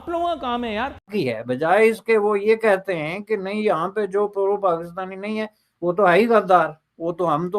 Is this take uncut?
no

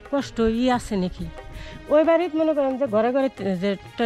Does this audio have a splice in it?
no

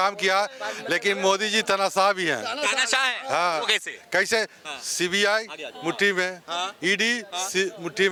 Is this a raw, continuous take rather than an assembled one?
yes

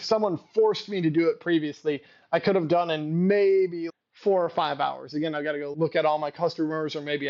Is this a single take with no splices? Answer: yes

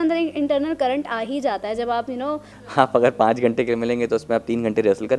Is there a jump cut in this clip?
yes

